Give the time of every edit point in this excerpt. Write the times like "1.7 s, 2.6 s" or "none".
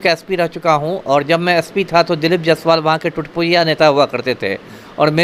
none